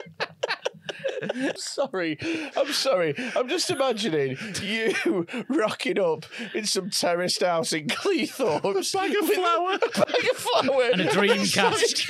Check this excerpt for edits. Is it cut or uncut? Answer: cut